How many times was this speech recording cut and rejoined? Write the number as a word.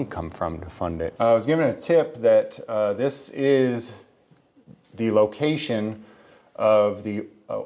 one